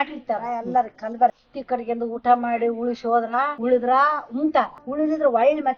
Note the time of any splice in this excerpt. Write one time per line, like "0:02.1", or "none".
0:01.5
0:03.5